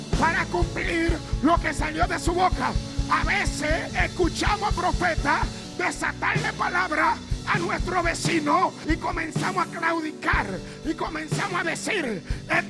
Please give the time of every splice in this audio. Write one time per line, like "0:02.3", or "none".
0:03.9
0:05.6
0:08.8